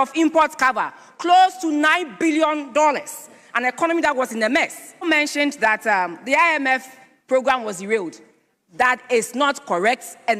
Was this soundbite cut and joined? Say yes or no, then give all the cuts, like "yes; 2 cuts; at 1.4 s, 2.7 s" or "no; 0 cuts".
yes; 1 cut; at 5.0 s